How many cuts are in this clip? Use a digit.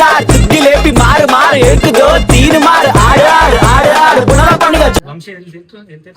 1